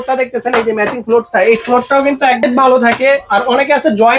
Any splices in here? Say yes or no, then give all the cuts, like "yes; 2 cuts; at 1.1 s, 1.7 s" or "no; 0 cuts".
yes; 1 cut; at 2.4 s